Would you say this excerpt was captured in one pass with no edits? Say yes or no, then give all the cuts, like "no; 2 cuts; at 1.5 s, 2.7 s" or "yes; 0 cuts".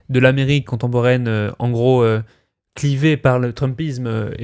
yes; 0 cuts